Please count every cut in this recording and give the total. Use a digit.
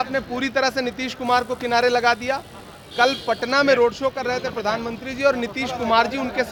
0